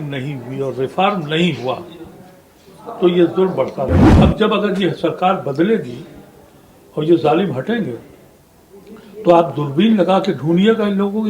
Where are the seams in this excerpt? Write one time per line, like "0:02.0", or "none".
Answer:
0:04.1